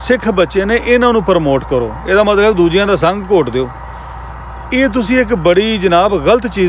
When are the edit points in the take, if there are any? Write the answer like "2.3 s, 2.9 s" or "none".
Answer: none